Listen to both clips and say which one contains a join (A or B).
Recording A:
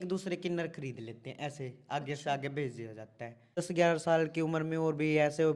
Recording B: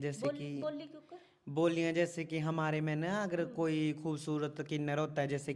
A